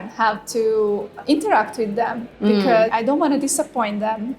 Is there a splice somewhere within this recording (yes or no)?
yes